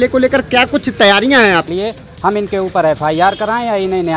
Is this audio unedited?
no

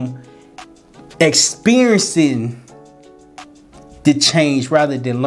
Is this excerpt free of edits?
yes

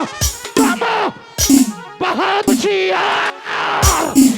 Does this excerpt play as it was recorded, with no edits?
no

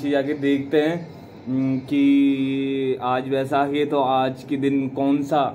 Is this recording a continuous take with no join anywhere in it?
yes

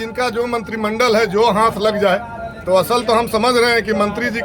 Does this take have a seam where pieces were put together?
no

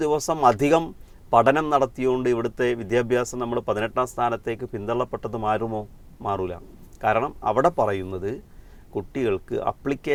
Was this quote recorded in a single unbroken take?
yes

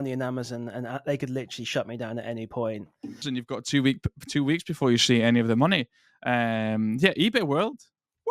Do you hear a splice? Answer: yes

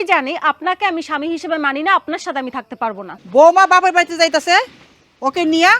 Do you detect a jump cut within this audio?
yes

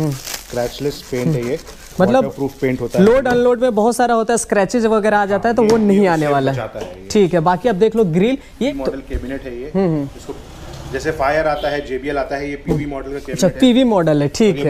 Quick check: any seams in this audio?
no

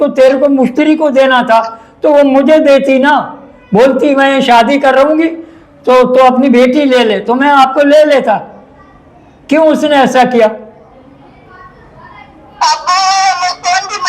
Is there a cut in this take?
no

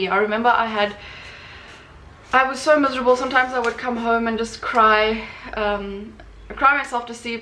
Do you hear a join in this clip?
no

